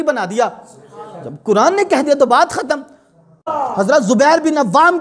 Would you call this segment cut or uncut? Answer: cut